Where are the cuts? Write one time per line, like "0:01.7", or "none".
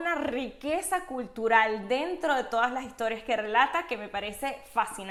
none

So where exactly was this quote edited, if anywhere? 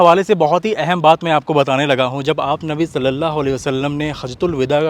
none

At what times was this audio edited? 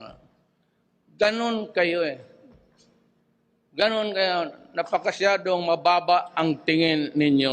0:03.8

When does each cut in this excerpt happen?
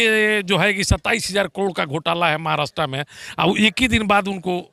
none

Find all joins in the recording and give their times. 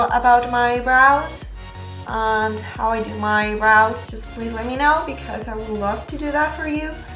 0:04.9

